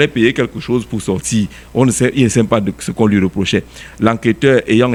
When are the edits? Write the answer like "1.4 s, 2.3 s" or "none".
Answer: none